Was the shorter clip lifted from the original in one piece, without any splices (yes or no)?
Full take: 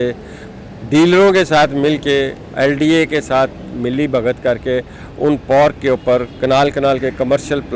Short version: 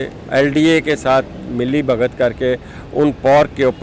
yes